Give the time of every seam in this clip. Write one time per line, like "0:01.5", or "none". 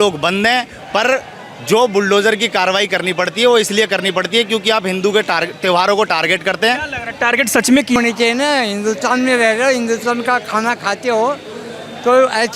0:08.0